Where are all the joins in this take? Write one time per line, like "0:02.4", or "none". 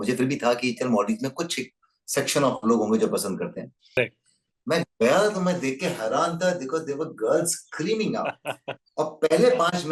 0:04.0